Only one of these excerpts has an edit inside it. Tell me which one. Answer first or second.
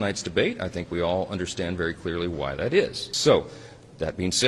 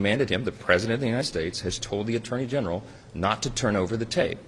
first